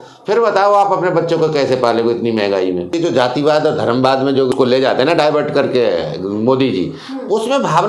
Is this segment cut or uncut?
cut